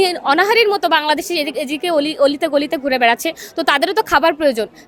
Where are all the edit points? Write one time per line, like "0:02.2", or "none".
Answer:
none